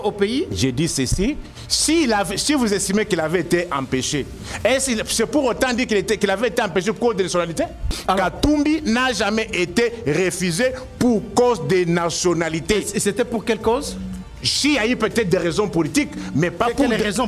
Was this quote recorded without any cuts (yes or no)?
no